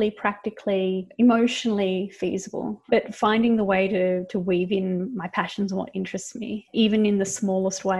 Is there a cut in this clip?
yes; 2 cuts; at 1.1 s, 3.0 s

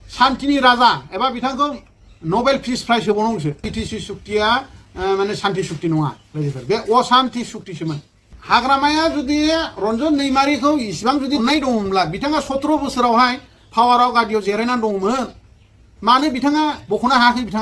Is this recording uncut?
no; 2 cuts; at 3.6 s, 8.3 s

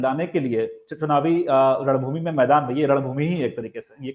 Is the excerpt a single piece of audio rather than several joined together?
yes; 0 cuts

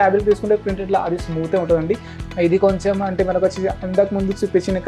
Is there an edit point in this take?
yes; 1 cut; at 2.1 s

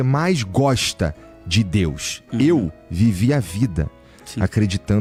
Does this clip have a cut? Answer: no; 0 cuts

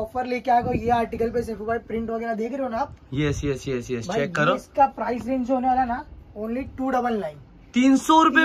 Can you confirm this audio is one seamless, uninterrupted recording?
yes; 0 cuts

